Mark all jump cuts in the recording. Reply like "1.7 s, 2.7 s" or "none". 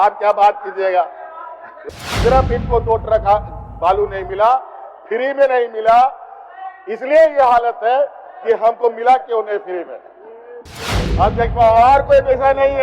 1.8 s